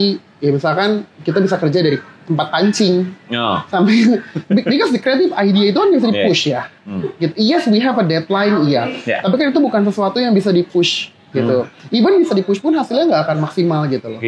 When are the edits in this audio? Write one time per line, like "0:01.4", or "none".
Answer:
none